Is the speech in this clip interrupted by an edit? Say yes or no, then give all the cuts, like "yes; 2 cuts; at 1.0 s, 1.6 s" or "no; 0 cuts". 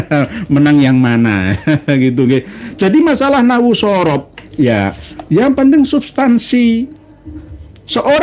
no; 0 cuts